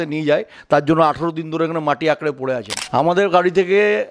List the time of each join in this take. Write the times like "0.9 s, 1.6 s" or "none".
2.7 s

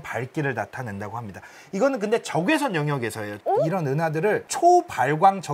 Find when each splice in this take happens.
3.3 s

